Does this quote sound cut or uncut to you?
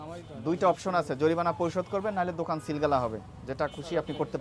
uncut